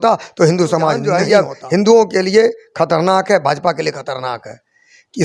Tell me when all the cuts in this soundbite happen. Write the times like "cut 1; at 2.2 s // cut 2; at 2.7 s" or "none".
cut 1; at 1.0 s